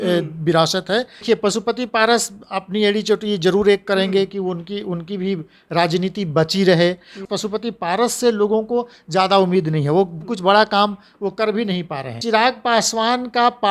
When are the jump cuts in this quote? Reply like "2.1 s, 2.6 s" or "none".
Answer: 1.2 s, 7.2 s, 12.2 s